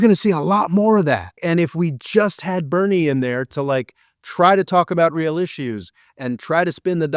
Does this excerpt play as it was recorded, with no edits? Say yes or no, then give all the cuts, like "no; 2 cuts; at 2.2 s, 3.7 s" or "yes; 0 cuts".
no; 1 cut; at 1.4 s